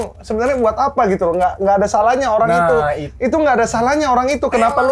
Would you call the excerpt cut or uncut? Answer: uncut